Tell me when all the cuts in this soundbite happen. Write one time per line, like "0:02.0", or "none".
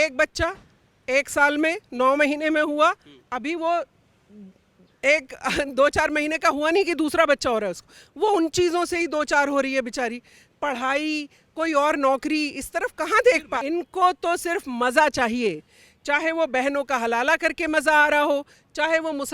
0:13.5